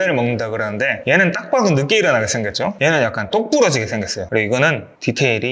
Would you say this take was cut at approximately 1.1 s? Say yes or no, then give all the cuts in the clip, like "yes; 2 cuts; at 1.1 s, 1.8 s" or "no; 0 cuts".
no; 2 cuts; at 2.7 s, 4.2 s